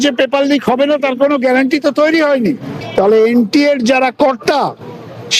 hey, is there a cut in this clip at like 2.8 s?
yes; 1 cut; at 2.8 s

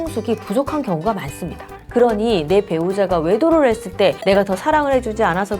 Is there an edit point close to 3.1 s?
no; 1 cut; at 1.8 s

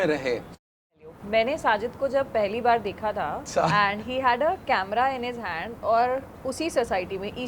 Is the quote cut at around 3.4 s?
yes; 2 cuts; at 0.9 s, 3.4 s

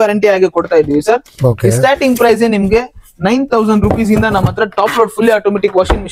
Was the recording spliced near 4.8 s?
no; 0 cuts

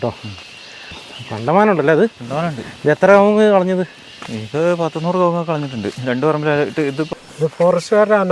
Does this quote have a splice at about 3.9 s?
no; 2 cuts; at 1.0 s, 7.1 s

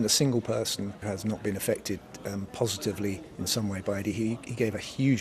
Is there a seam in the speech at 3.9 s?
no; 1 cut; at 1.0 s

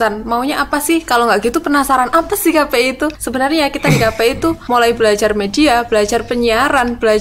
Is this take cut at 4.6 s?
yes; 2 cuts; at 3.2 s, 4.6 s

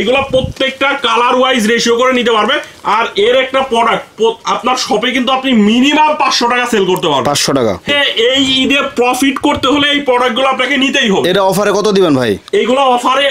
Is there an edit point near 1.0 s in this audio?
no; 1 cut; at 7.9 s

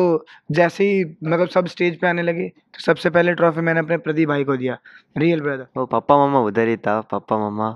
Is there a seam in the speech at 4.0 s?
no; 1 cut; at 5.6 s

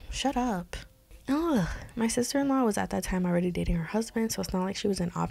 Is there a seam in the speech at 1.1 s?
yes; 1 cut; at 1.1 s

